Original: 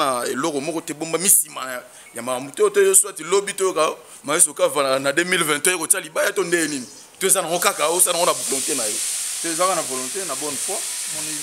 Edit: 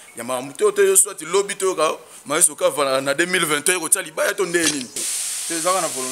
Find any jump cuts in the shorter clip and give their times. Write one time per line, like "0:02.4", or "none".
0:05.0

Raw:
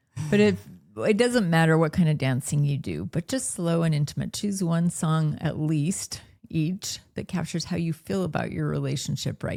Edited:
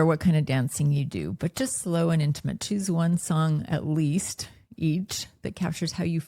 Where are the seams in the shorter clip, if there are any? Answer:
none

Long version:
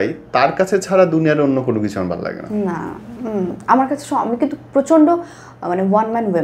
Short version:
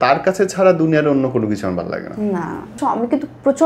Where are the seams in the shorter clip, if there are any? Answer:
0:02.7

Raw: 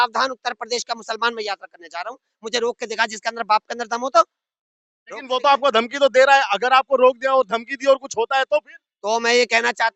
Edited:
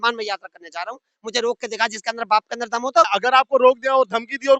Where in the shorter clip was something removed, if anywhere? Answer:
0:03.1

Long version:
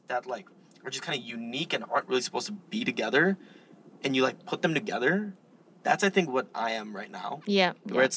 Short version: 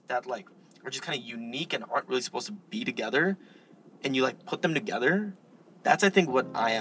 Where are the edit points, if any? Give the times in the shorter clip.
none

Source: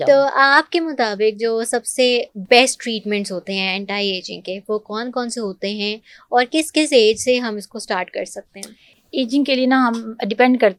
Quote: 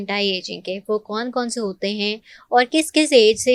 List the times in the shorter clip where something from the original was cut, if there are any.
none

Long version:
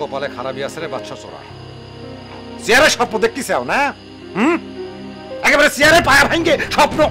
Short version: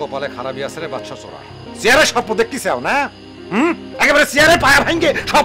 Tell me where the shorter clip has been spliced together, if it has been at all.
0:01.6
0:03.9

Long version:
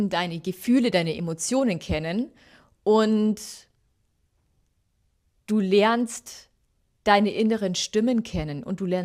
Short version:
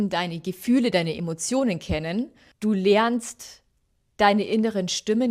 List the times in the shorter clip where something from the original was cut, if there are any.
0:02.4

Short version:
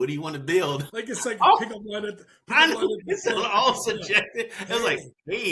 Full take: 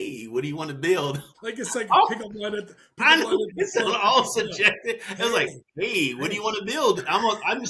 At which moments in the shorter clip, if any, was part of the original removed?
0:00.9

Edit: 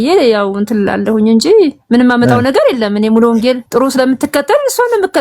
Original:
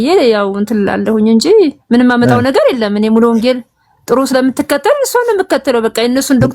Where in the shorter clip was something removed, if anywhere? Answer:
0:03.6

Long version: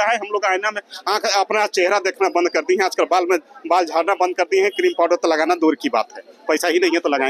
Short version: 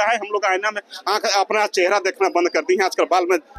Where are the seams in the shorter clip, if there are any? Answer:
none

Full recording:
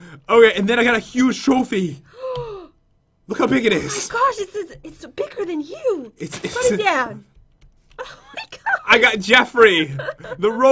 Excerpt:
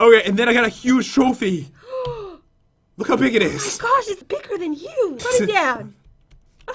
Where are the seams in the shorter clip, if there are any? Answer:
0:04.8

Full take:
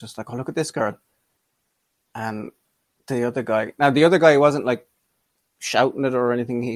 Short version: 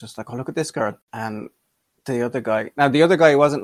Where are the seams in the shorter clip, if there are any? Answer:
0:01.1

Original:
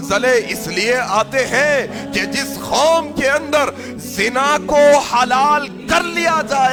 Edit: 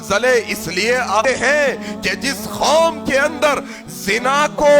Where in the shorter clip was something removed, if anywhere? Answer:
0:01.2

